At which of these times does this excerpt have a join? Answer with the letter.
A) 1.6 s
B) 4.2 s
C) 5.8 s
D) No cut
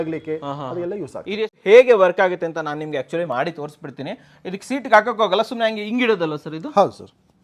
A